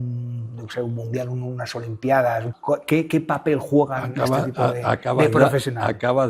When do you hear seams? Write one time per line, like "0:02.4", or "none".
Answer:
0:02.5